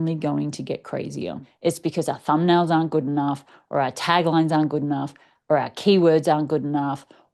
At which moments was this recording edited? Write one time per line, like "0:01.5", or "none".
0:01.4